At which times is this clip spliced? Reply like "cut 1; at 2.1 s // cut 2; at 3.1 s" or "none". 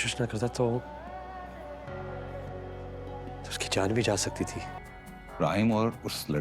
cut 1; at 4.8 s